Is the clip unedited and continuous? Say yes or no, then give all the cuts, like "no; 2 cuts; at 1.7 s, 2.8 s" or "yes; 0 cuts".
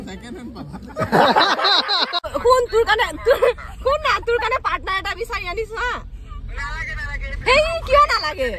no; 1 cut; at 2.3 s